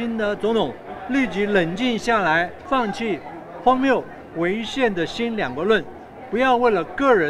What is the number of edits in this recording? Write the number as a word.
one